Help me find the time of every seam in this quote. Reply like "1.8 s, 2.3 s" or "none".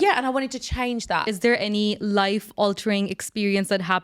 1.2 s